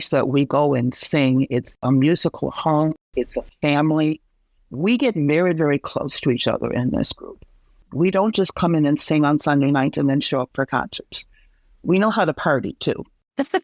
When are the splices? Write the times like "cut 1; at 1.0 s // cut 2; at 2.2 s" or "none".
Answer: none